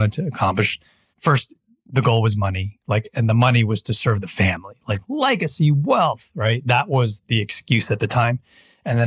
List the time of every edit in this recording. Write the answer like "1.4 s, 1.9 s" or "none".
1.1 s